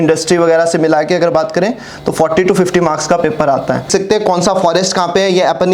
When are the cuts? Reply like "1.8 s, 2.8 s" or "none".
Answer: 3.9 s